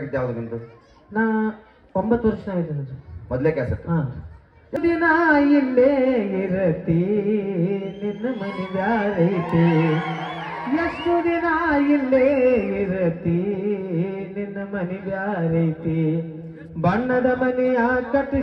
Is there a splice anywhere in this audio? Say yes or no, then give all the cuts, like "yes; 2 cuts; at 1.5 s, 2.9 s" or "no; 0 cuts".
yes; 1 cut; at 4.8 s